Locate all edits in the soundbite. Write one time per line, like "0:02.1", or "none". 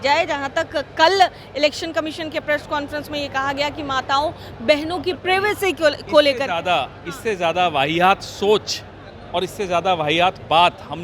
none